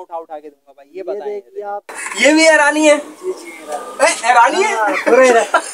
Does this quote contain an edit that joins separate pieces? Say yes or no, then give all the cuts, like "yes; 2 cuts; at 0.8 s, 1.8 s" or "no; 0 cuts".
yes; 1 cut; at 2.0 s